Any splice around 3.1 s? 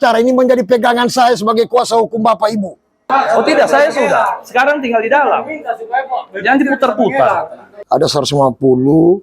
yes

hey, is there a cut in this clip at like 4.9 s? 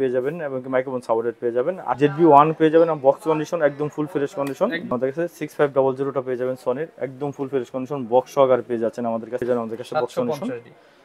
yes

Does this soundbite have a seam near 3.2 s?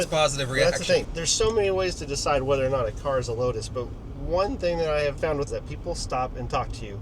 no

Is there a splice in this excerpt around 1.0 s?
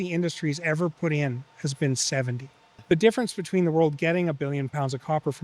no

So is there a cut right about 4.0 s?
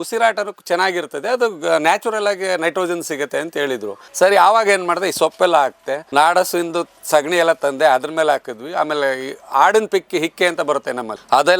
yes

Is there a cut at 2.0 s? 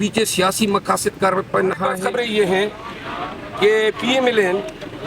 yes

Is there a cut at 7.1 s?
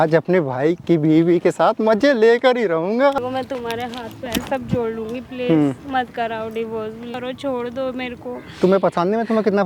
yes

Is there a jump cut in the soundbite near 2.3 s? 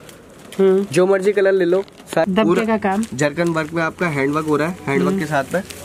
yes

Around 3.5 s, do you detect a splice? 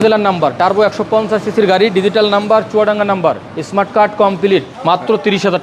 yes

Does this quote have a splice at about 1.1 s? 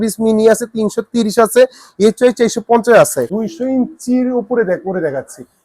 no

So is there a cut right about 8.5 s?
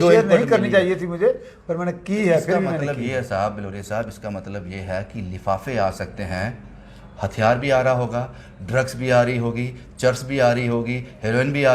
no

